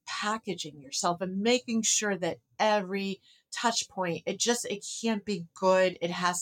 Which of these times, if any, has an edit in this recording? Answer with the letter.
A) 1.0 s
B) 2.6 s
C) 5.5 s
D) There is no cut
A